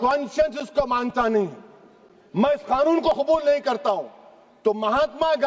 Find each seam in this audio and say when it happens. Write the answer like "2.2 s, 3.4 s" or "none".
none